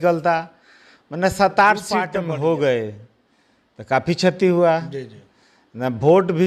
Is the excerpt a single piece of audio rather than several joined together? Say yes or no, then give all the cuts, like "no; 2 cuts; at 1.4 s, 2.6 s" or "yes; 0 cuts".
no; 1 cut; at 2.1 s